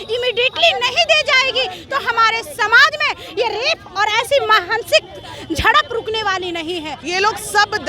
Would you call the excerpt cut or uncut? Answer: cut